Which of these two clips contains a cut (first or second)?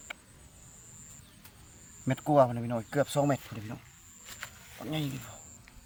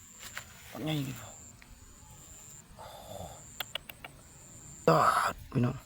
second